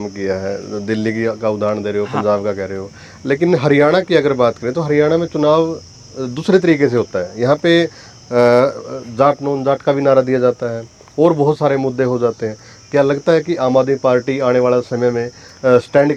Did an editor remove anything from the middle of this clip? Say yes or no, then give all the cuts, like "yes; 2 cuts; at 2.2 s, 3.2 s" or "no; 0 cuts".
no; 0 cuts